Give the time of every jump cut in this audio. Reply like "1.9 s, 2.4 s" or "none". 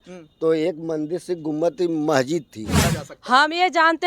3.0 s